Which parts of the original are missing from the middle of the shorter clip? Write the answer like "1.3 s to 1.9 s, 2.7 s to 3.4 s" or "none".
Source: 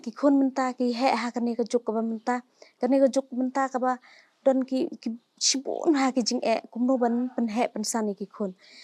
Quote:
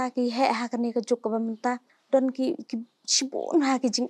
2.5 s to 4.2 s